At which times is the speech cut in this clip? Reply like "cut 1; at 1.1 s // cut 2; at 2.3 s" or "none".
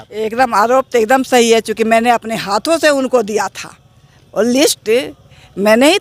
none